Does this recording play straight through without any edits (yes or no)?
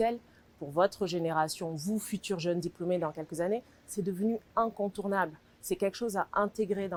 yes